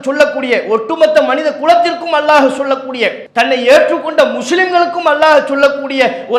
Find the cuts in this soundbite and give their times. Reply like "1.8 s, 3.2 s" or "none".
3.2 s